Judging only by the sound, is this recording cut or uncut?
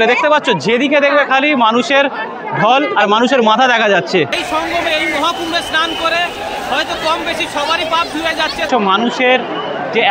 cut